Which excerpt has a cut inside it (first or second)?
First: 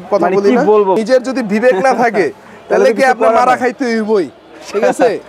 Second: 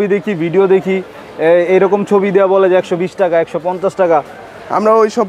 first